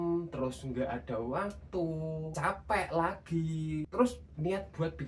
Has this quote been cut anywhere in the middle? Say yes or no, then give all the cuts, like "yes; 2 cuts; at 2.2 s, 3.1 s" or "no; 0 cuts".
yes; 2 cuts; at 2.3 s, 3.9 s